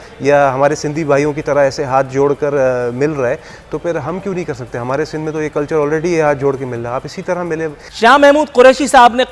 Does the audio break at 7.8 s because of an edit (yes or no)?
yes